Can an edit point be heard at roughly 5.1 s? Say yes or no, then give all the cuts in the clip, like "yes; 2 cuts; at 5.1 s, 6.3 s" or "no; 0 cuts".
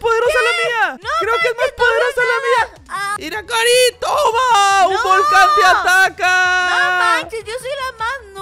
no; 2 cuts; at 1.0 s, 3.1 s